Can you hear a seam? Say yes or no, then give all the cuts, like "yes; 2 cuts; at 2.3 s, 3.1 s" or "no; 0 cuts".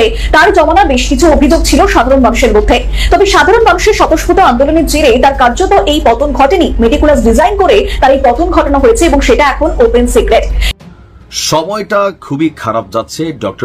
yes; 1 cut; at 10.6 s